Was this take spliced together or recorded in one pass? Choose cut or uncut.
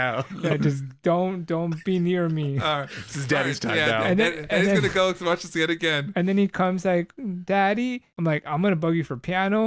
cut